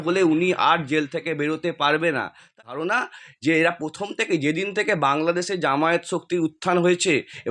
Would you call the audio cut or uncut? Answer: cut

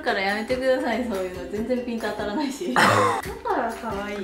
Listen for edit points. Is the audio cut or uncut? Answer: uncut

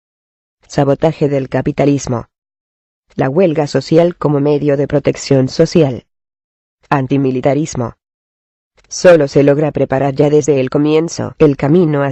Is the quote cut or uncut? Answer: uncut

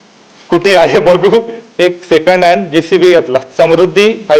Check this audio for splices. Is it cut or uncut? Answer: cut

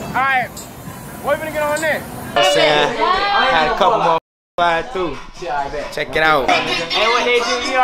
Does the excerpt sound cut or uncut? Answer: cut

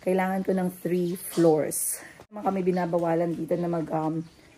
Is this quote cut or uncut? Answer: cut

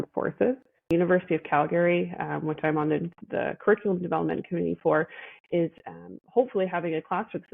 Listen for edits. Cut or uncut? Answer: cut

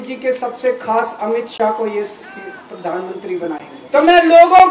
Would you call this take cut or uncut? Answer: cut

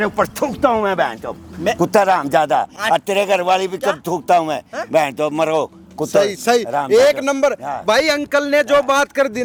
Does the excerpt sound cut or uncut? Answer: uncut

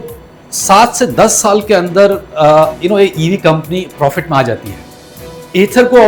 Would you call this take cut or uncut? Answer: uncut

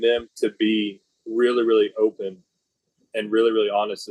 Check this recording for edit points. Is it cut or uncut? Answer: uncut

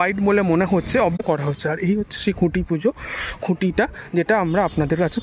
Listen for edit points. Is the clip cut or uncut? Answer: cut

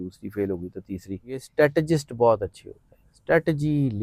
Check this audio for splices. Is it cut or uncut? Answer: cut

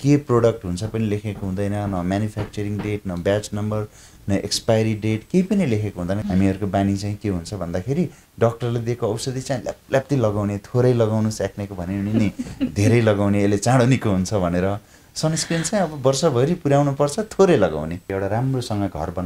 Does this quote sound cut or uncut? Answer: cut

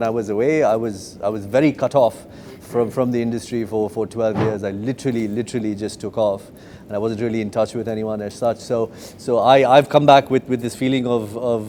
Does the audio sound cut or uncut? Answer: uncut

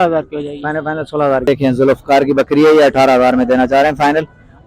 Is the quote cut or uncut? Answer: cut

